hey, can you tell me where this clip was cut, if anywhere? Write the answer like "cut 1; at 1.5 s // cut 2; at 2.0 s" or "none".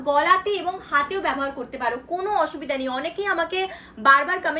none